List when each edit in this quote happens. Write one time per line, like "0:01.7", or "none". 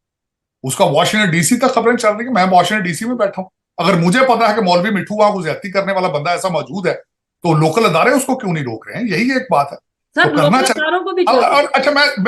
none